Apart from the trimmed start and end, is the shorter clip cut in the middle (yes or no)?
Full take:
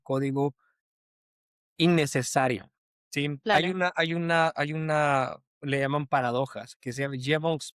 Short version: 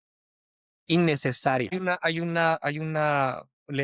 yes